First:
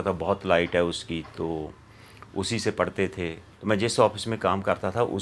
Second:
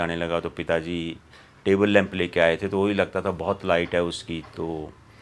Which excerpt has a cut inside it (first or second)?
first